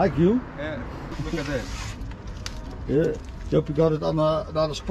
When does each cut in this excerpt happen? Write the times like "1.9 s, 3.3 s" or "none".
1.1 s